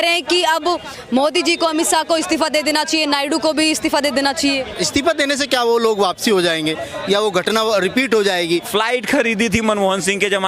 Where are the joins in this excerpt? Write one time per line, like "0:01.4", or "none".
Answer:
0:04.7
0:08.7